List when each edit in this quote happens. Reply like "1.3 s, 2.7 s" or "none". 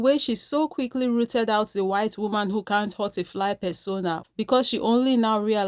3.9 s